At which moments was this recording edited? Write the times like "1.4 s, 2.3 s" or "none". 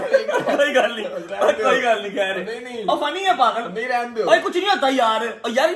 none